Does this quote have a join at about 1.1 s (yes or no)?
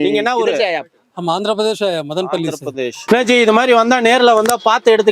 no